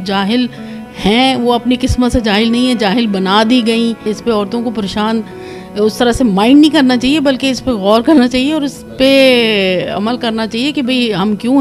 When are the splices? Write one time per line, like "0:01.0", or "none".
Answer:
0:04.1